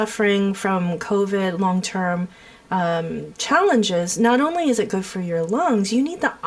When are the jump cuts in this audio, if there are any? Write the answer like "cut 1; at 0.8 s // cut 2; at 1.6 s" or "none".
none